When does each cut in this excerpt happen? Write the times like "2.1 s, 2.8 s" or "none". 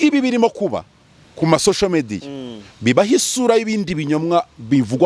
none